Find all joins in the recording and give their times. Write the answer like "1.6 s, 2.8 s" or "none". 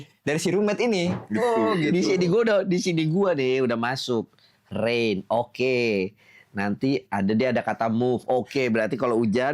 1.2 s